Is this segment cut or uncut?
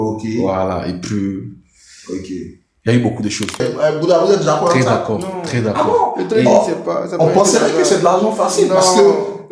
cut